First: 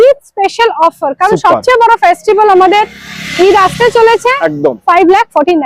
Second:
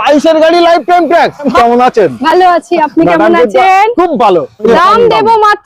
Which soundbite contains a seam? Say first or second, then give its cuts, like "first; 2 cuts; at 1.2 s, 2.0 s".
second; 2 cuts; at 1.5 s, 4.6 s